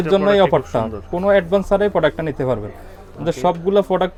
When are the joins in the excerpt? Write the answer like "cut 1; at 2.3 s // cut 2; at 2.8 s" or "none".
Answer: none